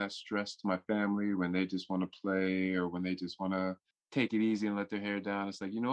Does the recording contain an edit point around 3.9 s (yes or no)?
yes